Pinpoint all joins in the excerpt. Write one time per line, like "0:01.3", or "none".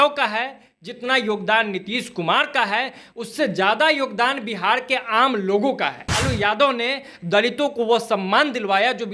0:06.2